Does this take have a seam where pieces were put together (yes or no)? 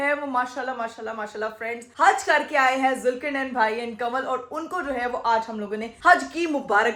no